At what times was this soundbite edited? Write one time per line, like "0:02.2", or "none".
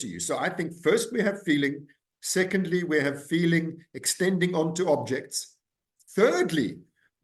none